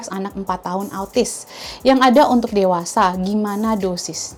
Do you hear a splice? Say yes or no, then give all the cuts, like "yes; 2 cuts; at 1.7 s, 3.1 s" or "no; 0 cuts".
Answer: no; 0 cuts